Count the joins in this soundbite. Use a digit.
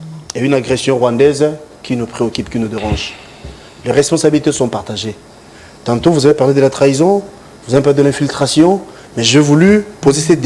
0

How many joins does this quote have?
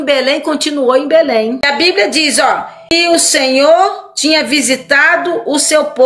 2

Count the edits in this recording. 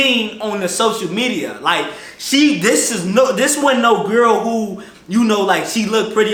0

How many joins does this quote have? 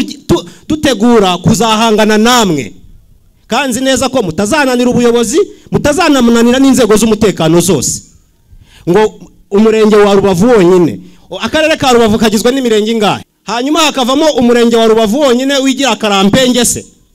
1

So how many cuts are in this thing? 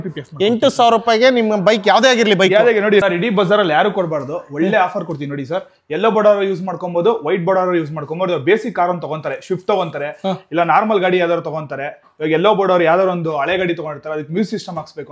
1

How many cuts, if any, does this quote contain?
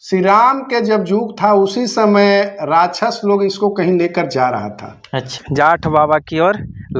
1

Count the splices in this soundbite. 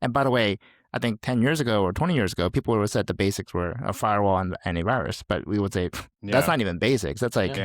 1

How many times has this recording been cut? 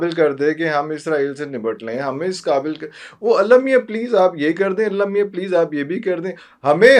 0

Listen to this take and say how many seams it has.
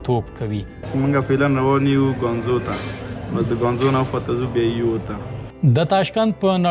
2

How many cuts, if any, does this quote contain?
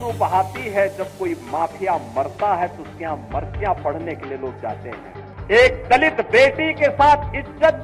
0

